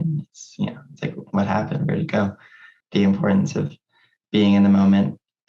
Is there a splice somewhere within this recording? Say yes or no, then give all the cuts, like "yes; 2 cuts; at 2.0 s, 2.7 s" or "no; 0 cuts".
yes; 1 cut; at 2.8 s